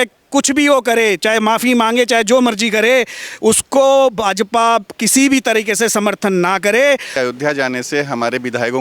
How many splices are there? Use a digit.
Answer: 1